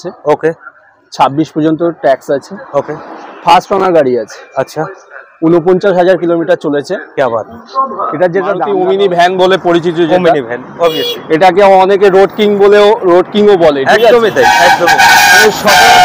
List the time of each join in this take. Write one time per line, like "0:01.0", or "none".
0:08.7